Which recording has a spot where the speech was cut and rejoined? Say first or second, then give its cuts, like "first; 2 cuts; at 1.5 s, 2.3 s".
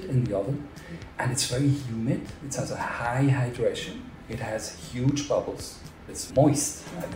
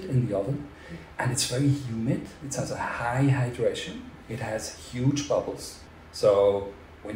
first; 1 cut; at 6.1 s